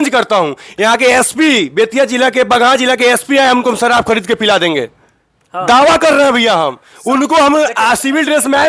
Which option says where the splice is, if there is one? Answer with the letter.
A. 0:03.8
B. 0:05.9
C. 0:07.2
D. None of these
D